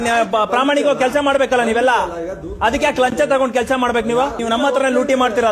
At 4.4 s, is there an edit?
yes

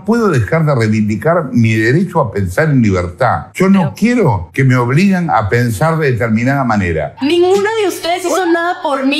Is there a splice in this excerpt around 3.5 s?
no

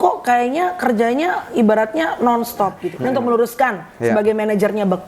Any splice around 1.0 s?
no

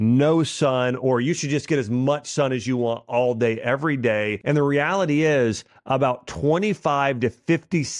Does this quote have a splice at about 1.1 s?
no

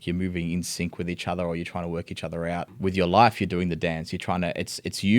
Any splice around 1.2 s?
no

